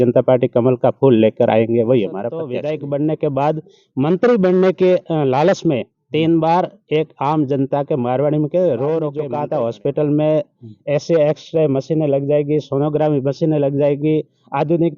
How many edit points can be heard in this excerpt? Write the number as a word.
two